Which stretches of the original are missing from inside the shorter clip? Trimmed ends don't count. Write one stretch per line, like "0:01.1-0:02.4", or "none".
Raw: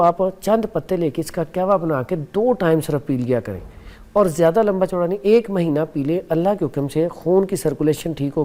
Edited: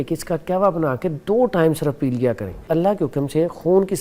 0:03.7-0:06.2